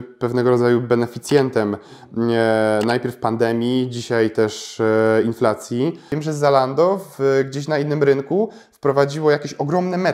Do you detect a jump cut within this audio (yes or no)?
yes